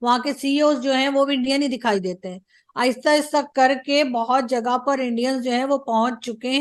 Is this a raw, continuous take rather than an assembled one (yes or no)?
yes